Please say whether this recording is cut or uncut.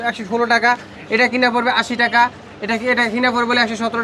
uncut